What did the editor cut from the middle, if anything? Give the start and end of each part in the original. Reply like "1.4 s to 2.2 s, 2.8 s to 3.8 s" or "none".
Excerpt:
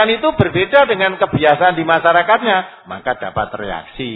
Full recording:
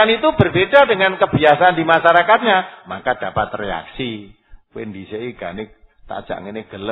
none